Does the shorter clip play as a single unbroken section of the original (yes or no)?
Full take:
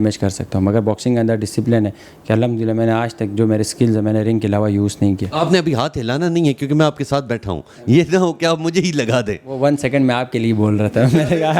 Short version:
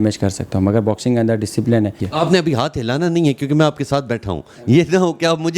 no